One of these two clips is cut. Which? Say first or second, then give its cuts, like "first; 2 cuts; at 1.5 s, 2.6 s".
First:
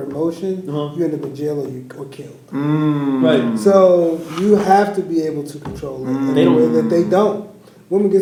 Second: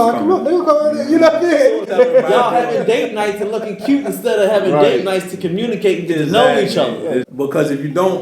second; 2 cuts; at 1.9 s, 7.3 s